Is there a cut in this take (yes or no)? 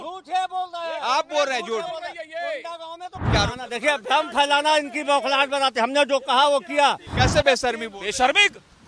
yes